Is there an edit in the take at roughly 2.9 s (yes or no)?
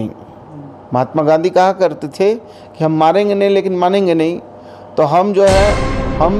no